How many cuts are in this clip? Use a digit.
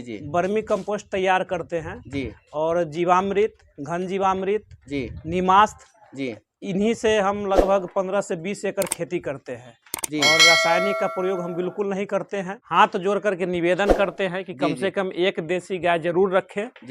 1